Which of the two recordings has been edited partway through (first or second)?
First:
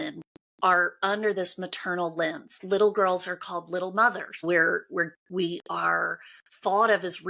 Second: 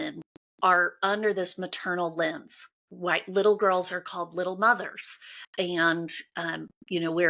first